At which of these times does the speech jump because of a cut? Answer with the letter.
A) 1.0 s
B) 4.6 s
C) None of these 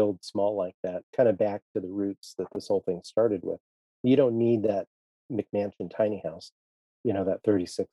A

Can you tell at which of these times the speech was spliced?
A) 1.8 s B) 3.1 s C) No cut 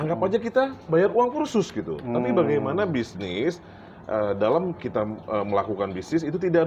C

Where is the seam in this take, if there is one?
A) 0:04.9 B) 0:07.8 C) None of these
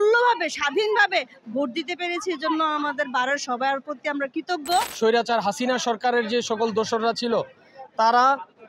A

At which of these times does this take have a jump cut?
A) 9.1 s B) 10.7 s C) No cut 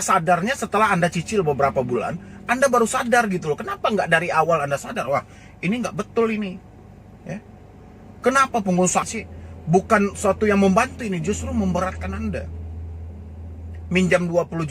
A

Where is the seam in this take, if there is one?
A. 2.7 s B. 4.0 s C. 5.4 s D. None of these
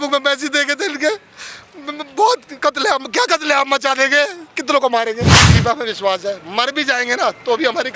C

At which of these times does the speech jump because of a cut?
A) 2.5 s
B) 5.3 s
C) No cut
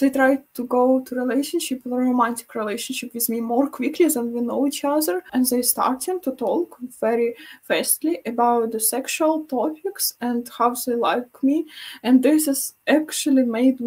B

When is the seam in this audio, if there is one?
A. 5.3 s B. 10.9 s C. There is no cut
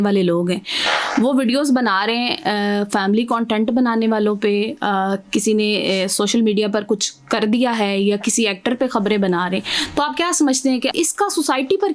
B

